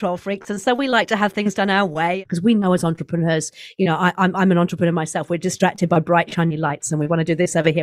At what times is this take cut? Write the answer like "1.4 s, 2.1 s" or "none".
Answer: 2.2 s

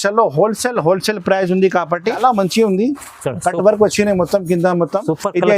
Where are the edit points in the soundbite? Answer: 2.2 s

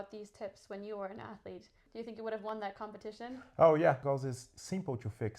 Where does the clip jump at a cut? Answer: 1.8 s, 4.0 s

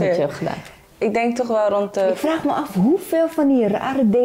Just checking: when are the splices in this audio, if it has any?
2.2 s

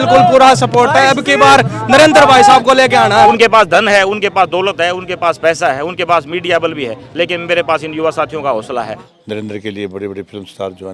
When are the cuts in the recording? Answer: 3.3 s, 9.0 s

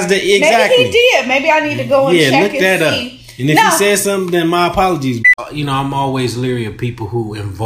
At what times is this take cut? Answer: 5.2 s

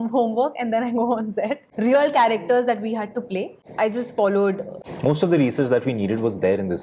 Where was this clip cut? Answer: 1.7 s, 3.6 s, 4.8 s

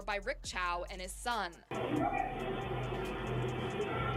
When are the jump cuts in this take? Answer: 1.7 s

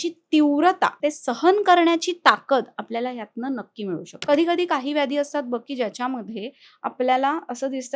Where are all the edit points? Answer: 1.0 s, 4.1 s

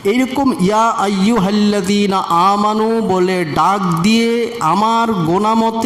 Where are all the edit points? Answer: none

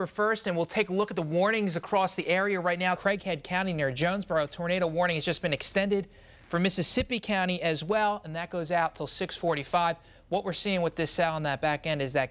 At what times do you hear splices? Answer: 3.0 s

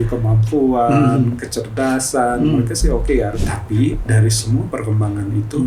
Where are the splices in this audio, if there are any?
3.4 s

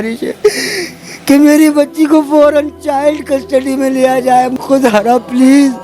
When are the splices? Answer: 4.5 s

